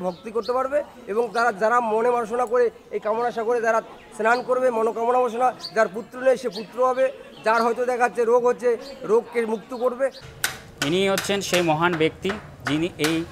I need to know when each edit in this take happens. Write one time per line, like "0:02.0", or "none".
0:10.2